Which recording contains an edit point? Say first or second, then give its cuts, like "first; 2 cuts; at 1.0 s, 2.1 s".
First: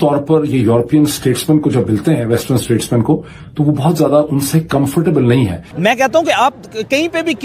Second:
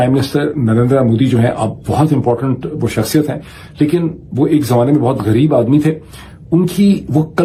first; 1 cut; at 5.6 s